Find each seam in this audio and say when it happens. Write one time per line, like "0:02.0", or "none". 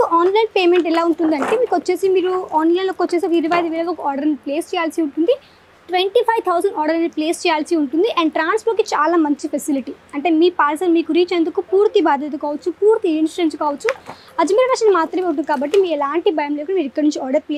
none